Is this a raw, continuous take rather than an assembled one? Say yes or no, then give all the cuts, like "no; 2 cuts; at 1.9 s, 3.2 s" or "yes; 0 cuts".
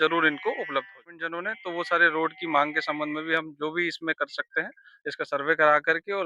no; 1 cut; at 1.2 s